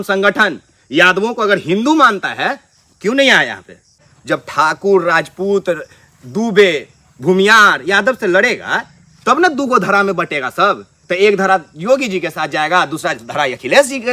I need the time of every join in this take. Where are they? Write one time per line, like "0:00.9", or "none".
0:04.1